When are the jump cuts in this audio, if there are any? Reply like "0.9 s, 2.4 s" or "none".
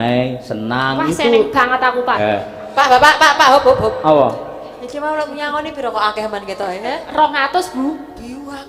2.1 s